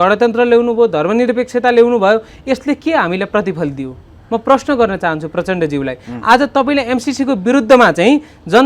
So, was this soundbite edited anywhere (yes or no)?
no